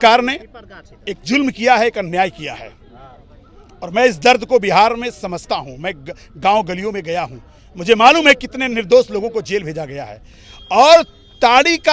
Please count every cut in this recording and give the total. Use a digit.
0